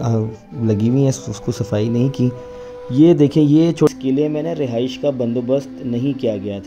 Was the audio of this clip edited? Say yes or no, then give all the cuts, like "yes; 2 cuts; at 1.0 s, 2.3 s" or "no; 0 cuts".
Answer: yes; 1 cut; at 3.9 s